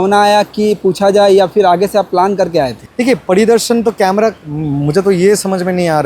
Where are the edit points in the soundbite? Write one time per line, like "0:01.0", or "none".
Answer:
0:02.8